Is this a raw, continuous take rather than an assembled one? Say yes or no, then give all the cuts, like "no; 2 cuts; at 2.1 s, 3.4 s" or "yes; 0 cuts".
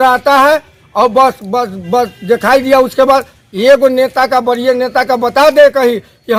yes; 0 cuts